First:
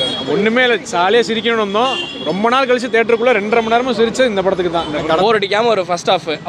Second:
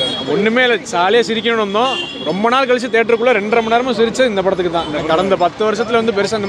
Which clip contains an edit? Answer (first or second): first